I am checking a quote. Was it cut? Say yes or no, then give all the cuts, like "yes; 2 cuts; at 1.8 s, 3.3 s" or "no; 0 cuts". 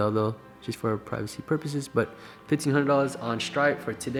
no; 0 cuts